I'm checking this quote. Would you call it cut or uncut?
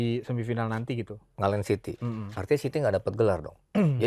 uncut